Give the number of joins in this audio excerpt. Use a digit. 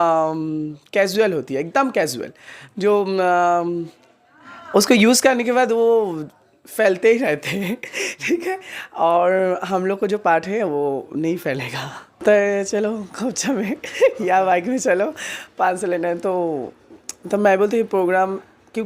1